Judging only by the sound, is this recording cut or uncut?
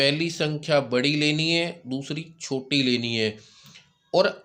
uncut